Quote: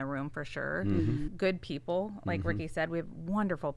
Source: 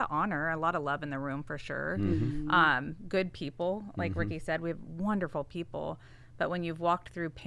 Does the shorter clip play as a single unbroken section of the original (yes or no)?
no